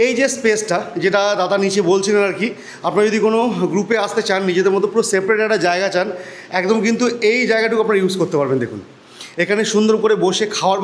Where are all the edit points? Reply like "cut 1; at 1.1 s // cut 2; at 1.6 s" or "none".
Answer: none